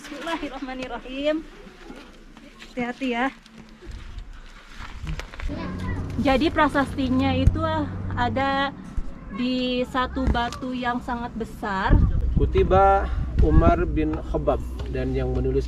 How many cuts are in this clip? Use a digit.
2